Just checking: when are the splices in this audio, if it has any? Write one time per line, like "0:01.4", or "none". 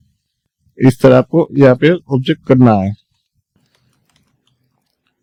none